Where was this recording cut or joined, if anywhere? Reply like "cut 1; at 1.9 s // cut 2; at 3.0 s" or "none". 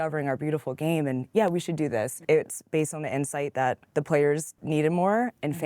cut 1; at 2.2 s // cut 2; at 3.8 s // cut 3; at 4.5 s